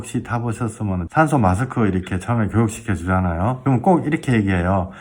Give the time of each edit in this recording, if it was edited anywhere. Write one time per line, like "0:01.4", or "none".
0:01.0
0:03.6